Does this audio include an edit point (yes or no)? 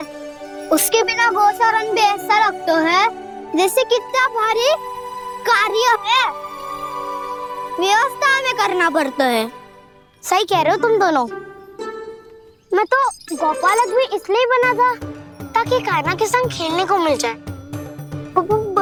no